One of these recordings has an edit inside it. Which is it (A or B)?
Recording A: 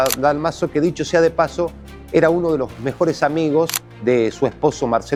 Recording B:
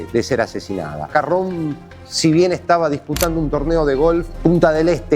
B